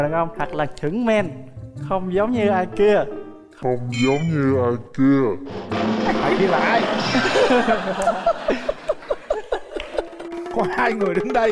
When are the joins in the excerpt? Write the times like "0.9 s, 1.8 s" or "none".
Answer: none